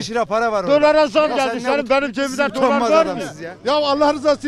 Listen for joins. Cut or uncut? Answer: cut